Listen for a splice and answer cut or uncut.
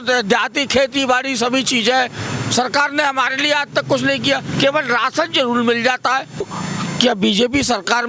cut